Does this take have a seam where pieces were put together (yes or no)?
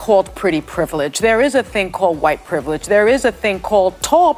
no